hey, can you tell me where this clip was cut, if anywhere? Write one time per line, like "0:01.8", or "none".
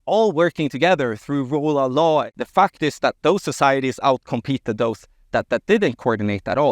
0:02.3